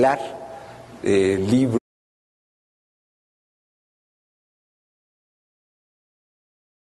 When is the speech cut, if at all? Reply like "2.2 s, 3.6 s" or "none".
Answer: none